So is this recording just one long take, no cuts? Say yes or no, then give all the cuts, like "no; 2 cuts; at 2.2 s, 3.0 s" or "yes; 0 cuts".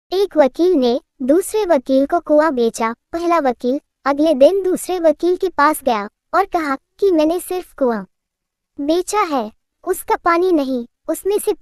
yes; 0 cuts